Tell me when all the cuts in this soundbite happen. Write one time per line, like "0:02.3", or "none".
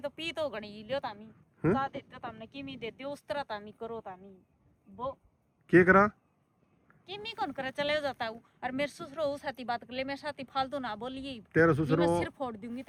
none